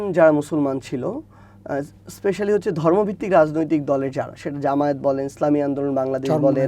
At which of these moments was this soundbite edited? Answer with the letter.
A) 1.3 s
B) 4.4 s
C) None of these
C